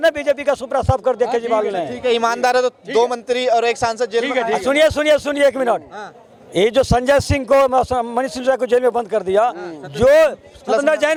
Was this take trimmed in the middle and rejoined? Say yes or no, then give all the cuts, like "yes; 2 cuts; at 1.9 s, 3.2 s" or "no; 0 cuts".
no; 0 cuts